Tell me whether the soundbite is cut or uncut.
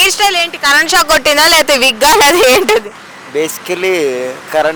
uncut